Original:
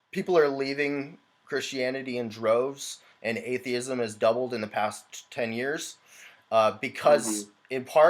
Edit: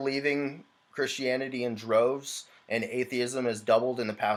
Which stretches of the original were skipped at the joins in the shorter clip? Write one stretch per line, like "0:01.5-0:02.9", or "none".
none